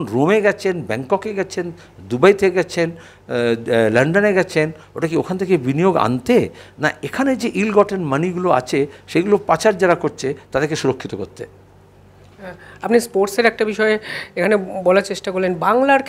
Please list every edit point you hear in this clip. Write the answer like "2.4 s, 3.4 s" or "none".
none